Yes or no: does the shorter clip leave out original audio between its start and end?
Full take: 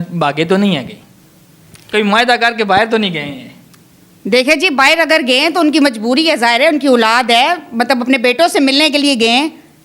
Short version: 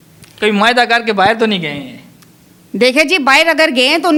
no